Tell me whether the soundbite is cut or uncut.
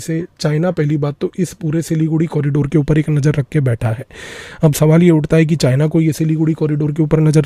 uncut